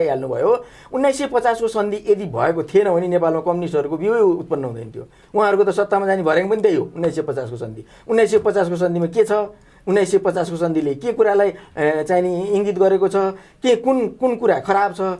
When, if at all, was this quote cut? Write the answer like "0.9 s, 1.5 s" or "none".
none